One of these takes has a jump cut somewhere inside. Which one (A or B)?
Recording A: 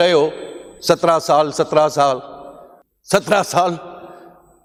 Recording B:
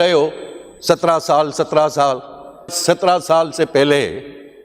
B